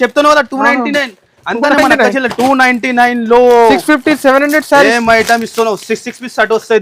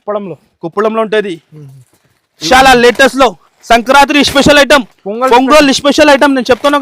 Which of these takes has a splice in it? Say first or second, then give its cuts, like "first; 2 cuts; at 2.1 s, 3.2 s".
second; 1 cut; at 2.4 s